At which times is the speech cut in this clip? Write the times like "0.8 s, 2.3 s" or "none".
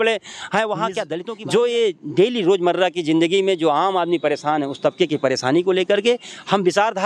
1.1 s